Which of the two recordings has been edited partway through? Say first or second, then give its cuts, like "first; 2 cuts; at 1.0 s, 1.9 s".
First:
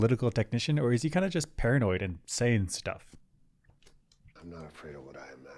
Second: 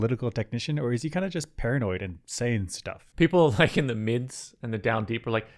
second; 1 cut; at 3.0 s